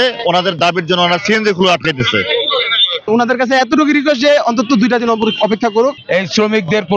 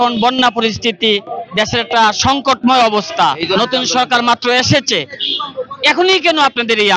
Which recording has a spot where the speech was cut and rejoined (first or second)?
first